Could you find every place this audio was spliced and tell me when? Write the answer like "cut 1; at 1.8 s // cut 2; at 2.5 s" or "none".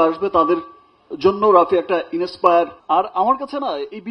cut 1; at 2.8 s